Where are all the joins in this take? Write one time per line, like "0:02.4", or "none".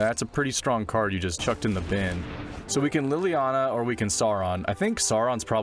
0:01.4
0:02.6